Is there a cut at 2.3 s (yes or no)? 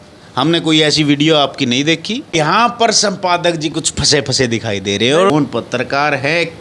yes